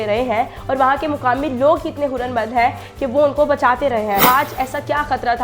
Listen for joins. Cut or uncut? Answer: cut